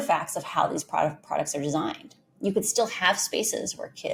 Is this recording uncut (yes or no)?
yes